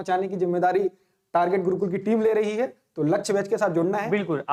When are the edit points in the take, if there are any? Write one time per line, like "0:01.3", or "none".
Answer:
none